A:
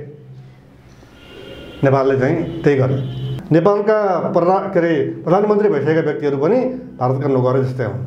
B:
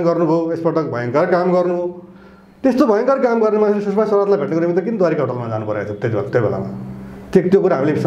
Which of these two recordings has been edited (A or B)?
A